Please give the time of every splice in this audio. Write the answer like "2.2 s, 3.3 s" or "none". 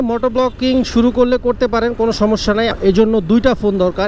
2.8 s